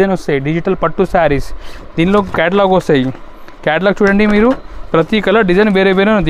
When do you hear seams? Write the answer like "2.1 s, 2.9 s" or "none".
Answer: none